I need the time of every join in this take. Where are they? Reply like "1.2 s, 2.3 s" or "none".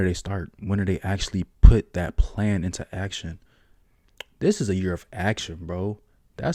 none